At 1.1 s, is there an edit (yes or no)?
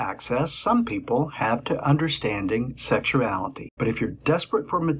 no